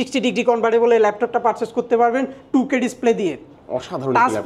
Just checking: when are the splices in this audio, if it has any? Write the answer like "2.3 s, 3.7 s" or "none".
none